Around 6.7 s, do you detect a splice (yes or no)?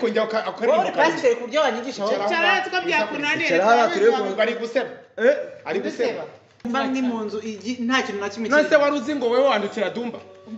yes